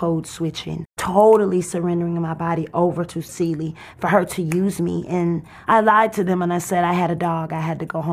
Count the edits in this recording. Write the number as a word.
three